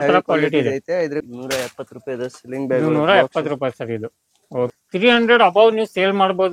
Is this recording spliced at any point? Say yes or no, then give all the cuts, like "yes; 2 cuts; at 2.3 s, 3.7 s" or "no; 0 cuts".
yes; 2 cuts; at 1.3 s, 4.7 s